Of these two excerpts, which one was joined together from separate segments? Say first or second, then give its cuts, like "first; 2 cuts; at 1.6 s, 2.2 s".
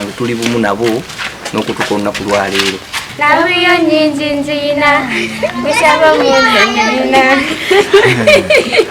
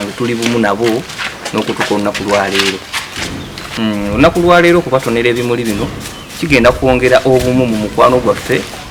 first; 1 cut; at 3.1 s